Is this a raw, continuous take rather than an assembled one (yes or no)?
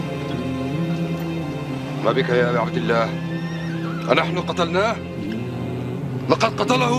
yes